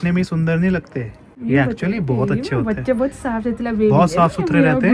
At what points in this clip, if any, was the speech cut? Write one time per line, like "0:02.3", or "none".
none